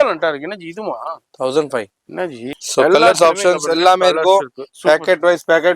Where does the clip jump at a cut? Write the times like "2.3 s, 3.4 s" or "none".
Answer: 2.5 s